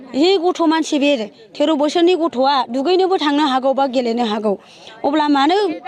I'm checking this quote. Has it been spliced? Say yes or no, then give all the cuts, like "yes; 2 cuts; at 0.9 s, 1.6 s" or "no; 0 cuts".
no; 0 cuts